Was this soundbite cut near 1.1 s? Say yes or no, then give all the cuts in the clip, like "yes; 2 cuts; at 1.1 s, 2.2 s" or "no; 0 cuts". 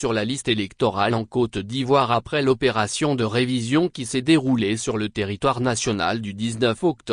yes; 1 cut; at 1.1 s